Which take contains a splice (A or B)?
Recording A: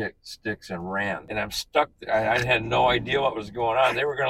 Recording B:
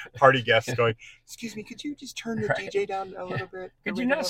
A